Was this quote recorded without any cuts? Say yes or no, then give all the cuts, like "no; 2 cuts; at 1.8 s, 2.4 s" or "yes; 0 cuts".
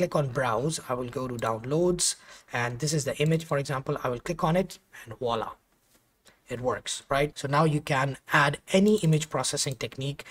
no; 1 cut; at 7.4 s